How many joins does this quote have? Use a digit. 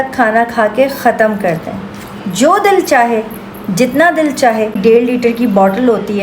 1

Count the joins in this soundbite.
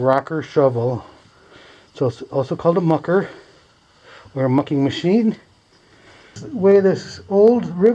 1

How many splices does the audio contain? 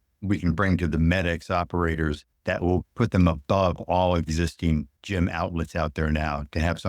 2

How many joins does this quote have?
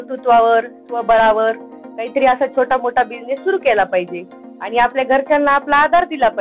0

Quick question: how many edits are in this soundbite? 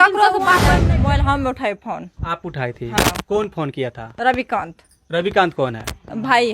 1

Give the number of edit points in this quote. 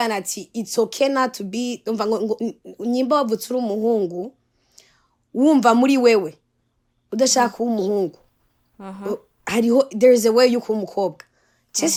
0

